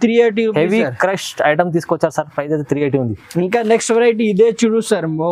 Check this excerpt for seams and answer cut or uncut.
uncut